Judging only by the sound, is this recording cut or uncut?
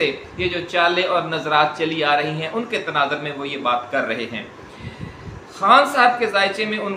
uncut